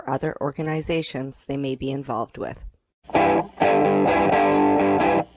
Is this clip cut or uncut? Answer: cut